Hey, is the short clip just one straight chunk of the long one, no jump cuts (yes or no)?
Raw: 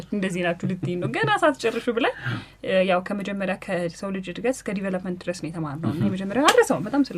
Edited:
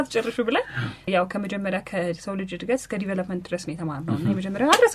no